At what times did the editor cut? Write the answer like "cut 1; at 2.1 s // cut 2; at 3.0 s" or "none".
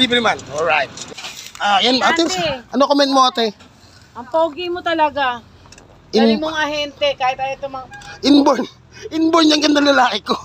cut 1; at 1.2 s